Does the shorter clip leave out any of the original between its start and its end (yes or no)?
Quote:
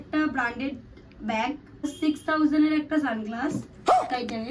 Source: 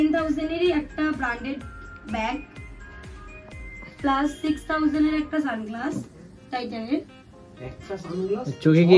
yes